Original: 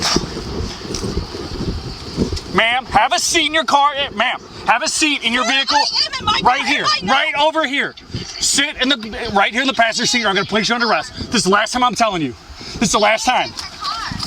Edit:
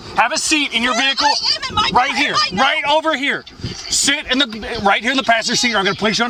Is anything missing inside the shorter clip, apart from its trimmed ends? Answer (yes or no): no